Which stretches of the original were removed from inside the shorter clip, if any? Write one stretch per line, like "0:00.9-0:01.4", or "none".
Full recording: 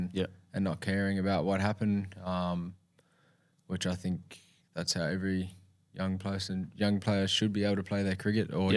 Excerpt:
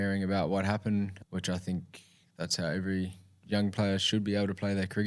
0:02.1-0:03.6
0:05.8-0:06.7